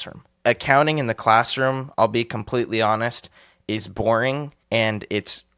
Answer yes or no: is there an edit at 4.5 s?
yes